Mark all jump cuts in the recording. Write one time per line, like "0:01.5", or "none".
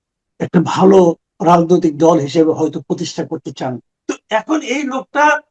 0:03.9